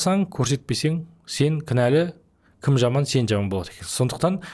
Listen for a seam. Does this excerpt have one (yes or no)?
no